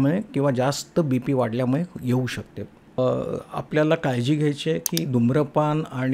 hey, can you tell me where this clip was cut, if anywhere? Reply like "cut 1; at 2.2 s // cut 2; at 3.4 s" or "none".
cut 1; at 3.0 s